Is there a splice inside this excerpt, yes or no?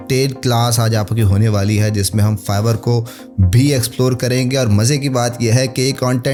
no